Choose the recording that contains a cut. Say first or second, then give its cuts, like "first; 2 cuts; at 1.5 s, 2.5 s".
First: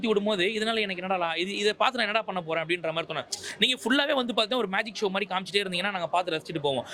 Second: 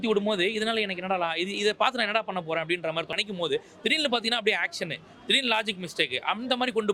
second; 1 cut; at 3.2 s